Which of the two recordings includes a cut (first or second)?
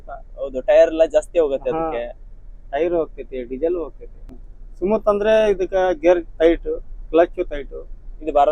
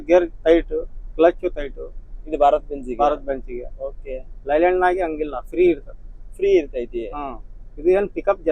first